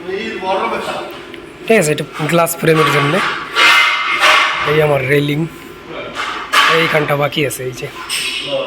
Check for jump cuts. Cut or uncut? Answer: uncut